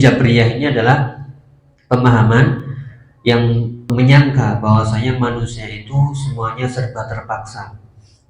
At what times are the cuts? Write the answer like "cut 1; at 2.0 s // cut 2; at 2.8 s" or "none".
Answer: cut 1; at 3.9 s